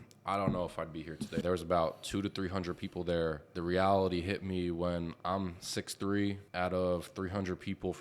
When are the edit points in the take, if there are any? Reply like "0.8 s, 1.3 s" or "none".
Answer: 1.4 s, 3.5 s, 6.4 s